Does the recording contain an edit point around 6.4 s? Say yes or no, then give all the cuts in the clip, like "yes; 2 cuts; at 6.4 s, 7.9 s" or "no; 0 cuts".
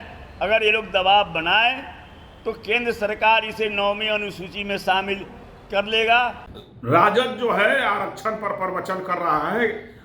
yes; 1 cut; at 6.4 s